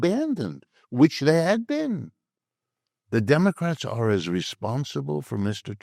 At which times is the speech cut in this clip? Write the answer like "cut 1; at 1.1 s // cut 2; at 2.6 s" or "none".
none